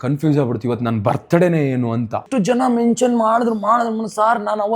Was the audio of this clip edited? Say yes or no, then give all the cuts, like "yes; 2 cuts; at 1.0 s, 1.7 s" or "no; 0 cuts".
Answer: yes; 1 cut; at 2.3 s